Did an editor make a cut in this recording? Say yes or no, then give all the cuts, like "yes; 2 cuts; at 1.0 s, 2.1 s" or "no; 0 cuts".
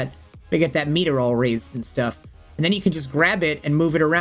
no; 0 cuts